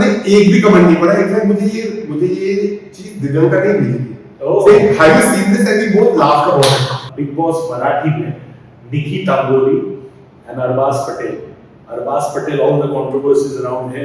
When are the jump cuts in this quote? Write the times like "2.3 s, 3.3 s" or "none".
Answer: 7.0 s